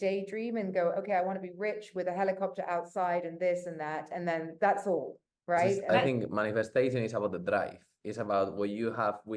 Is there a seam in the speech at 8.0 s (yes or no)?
no